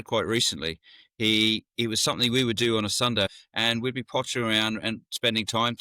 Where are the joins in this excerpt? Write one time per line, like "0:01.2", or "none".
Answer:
0:03.3